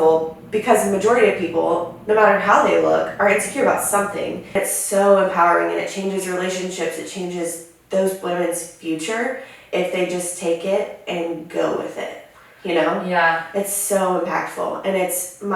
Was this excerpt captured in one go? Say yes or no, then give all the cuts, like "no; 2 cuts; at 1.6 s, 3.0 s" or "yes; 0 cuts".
no; 1 cut; at 4.5 s